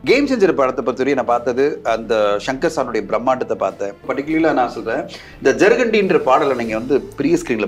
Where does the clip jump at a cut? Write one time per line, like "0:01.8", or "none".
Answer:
0:04.1

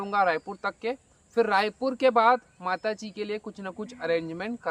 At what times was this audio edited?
none

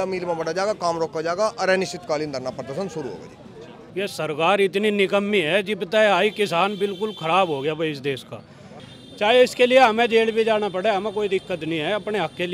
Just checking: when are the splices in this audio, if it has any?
0:03.8
0:08.8

